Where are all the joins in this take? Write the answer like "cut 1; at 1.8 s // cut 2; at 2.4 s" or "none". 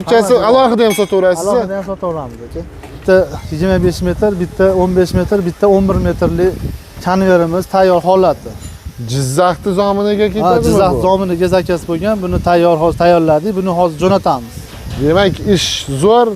cut 1; at 2.9 s